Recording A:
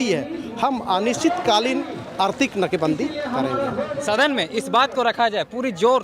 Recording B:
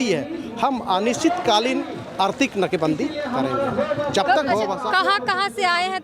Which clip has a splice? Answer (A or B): A